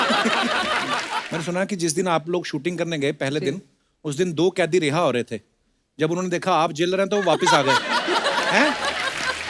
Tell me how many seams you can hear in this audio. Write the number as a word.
one